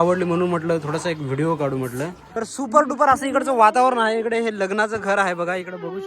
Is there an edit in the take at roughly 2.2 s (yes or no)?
yes